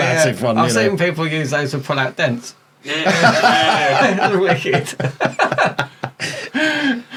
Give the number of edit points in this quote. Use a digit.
0